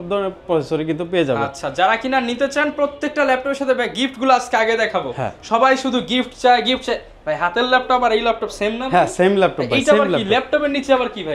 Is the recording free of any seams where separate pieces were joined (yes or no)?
yes